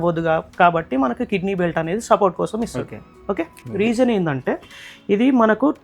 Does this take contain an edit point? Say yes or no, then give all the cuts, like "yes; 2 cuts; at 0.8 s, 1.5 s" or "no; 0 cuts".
yes; 1 cut; at 3.6 s